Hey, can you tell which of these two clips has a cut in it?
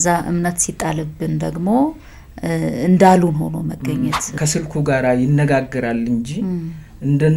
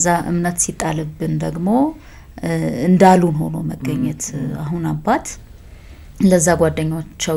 first; 1 cut; at 4.4 s

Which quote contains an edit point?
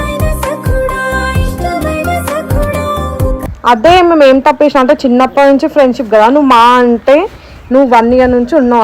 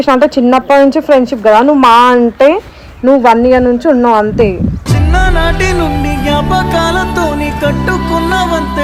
first; 1 cut; at 3.5 s

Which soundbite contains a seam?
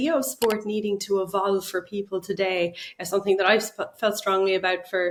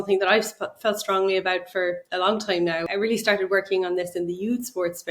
second; 1 cut; at 2.8 s

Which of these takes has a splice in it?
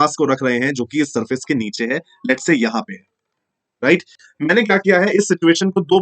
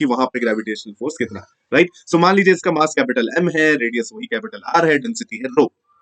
first; 1 cut; at 4.1 s

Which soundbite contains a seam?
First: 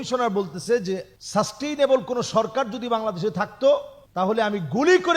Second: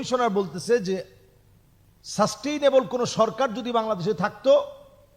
first; 2 cuts; at 1.2 s, 4.0 s

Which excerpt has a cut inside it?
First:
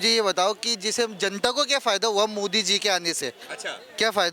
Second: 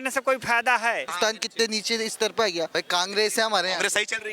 second; 2 cuts; at 1.1 s, 2.7 s

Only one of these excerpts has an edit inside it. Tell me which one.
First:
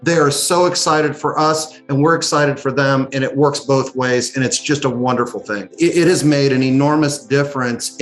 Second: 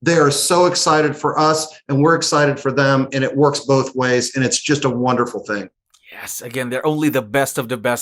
first; 1 cut; at 5.6 s

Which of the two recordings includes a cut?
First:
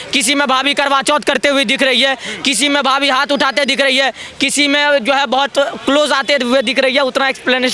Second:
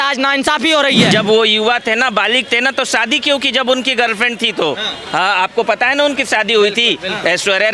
second; 1 cut; at 1.1 s

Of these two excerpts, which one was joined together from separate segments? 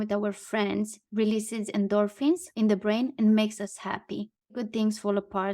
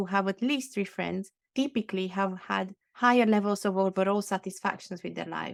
first; 2 cuts; at 1.0 s, 4.5 s

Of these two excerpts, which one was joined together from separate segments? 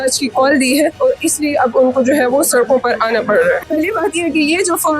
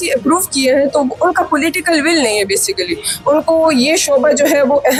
first; 2 cuts; at 0.9 s, 3.6 s

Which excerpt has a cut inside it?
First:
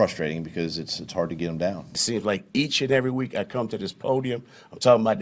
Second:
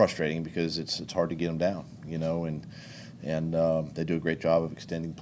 first; 1 cut; at 2.0 s

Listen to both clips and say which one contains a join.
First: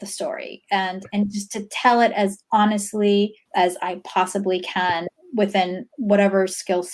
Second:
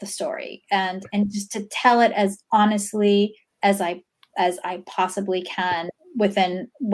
first; 1 cut; at 3.4 s

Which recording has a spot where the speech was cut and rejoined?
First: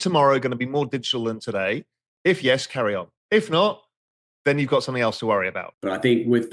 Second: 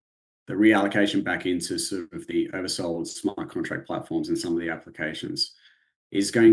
first; 2 cuts; at 3.1 s, 5.6 s

